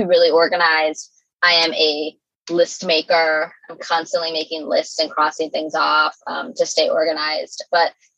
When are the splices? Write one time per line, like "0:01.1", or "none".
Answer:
none